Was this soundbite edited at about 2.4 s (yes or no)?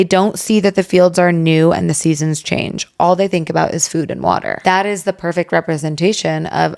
no